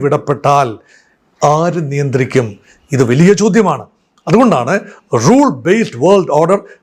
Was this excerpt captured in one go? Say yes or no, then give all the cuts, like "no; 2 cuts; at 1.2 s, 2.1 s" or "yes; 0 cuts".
yes; 0 cuts